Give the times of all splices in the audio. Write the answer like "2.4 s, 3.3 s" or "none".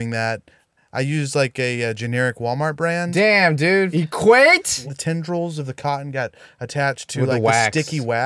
3.9 s, 4.9 s